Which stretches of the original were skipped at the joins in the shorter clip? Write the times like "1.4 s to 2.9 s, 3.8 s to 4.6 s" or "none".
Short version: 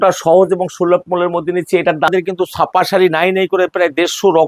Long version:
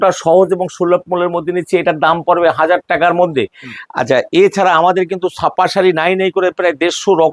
2.1 s to 4.9 s